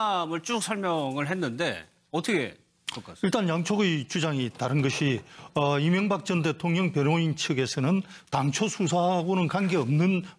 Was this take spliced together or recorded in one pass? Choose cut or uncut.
cut